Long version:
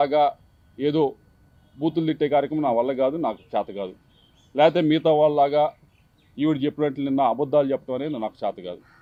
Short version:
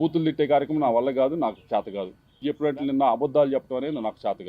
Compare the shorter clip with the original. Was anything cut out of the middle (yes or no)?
yes